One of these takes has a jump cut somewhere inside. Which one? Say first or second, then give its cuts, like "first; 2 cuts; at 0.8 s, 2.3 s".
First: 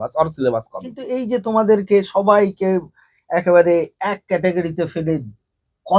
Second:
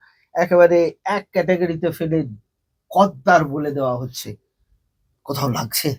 first; 1 cut; at 1.1 s